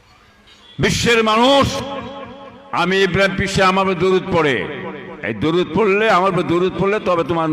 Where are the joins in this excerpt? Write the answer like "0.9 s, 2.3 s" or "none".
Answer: 1.8 s